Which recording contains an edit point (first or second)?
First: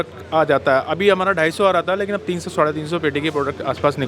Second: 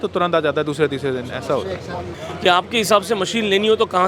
second